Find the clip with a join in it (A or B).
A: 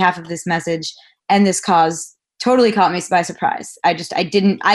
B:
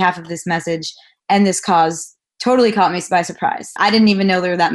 B